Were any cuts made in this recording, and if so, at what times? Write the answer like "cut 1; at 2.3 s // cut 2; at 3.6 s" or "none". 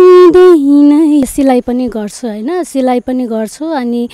cut 1; at 1.2 s